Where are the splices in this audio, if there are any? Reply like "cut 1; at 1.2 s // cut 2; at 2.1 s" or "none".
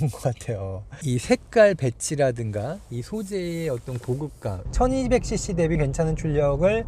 cut 1; at 4.6 s // cut 2; at 5.8 s